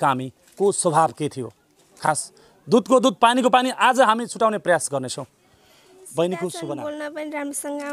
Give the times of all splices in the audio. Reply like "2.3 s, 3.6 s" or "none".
6.6 s